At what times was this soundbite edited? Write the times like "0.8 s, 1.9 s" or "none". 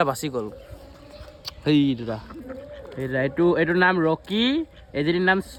none